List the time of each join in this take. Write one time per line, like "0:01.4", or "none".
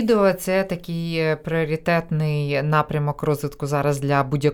none